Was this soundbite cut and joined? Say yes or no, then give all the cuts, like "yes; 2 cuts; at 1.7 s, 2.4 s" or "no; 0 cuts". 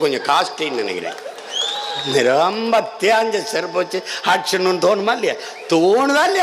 no; 0 cuts